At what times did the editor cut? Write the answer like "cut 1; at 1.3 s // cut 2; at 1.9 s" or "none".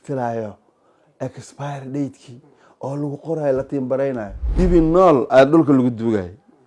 cut 1; at 4.4 s